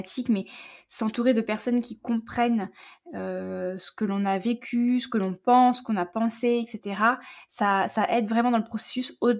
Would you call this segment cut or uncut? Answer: uncut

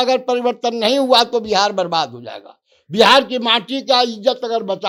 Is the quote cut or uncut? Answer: uncut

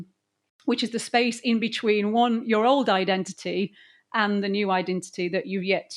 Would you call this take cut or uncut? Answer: uncut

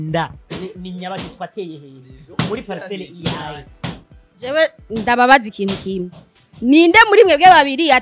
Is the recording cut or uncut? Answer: uncut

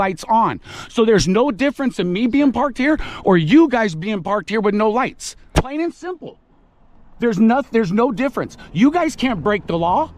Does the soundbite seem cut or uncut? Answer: cut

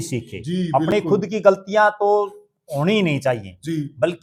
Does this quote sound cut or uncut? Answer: uncut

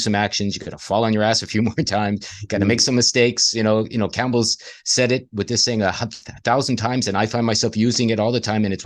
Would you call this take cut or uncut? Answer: uncut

